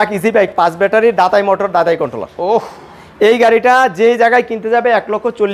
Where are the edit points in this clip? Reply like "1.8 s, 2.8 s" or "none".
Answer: none